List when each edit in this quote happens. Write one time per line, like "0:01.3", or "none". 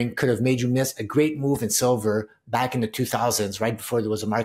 none